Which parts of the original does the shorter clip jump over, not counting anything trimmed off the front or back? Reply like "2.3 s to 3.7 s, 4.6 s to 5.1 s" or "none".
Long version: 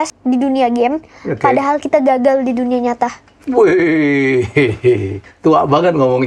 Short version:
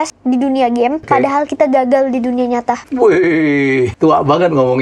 1.0 s to 1.3 s, 3.1 s to 3.4 s, 4.5 s to 5.4 s